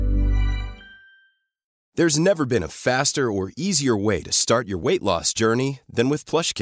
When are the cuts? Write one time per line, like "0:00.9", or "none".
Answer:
0:01.7